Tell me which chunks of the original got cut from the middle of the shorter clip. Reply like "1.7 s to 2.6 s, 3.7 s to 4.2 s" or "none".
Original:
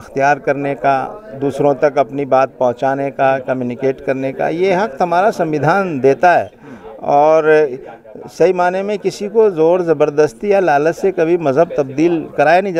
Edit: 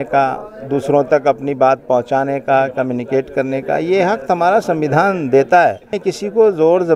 6.6 s to 8.9 s